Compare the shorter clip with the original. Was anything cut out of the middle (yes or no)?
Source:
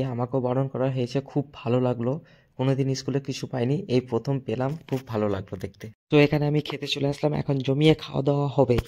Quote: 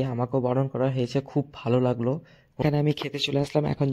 yes